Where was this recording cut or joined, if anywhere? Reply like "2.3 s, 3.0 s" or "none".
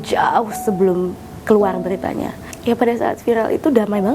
2.4 s